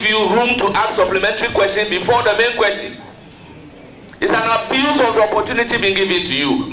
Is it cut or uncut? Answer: uncut